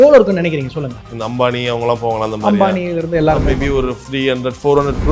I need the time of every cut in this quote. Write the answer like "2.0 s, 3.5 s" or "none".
1.1 s, 4.0 s